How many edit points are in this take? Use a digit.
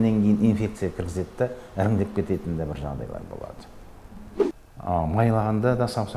1